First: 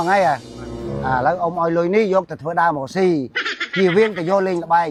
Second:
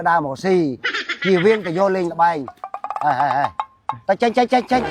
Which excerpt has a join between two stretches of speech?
second; 1 cut; at 3.8 s

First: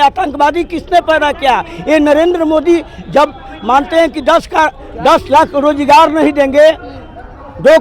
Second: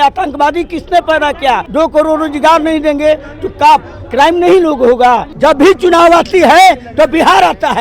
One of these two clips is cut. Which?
second; 2 cuts; at 1.7 s, 5.3 s

